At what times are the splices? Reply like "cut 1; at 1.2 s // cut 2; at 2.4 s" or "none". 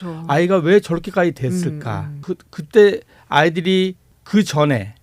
cut 1; at 2.1 s // cut 2; at 4.1 s